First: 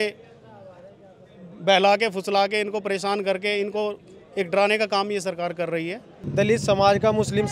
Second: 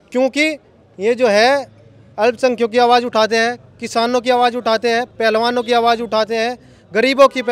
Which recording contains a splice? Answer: first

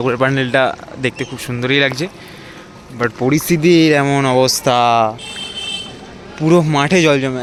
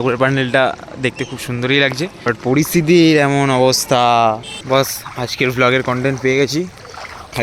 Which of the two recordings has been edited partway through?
second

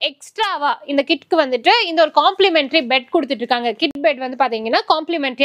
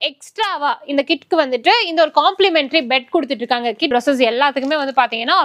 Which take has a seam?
second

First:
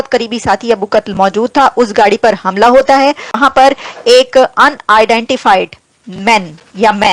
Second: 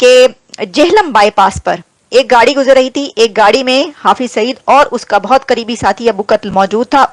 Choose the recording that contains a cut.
first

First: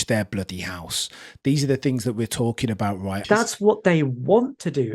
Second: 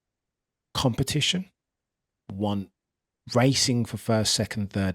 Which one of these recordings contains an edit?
first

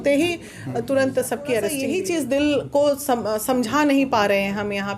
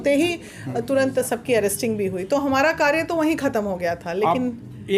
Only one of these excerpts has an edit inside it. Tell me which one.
first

